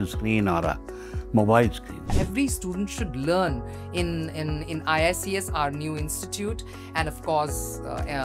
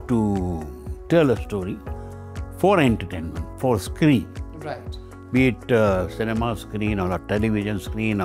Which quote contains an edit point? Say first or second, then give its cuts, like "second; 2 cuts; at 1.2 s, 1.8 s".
first; 1 cut; at 2.1 s